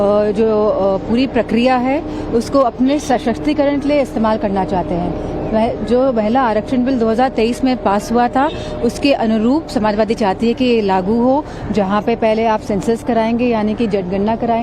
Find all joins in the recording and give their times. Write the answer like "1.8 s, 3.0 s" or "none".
5.0 s